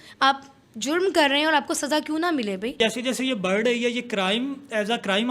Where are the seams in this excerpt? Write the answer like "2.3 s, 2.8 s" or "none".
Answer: 2.8 s